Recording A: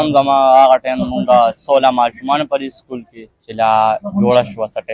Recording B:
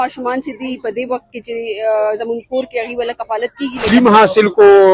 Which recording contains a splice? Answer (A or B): B